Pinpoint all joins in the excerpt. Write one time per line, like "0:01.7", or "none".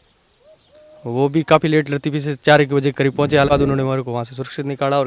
0:03.5

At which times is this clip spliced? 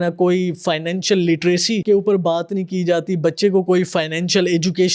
0:01.8

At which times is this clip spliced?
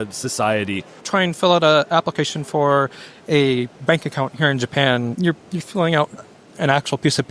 0:01.0
0:05.2

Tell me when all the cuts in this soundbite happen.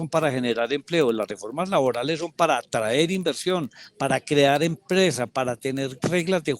none

